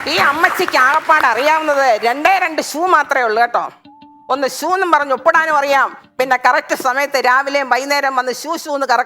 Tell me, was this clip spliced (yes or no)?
no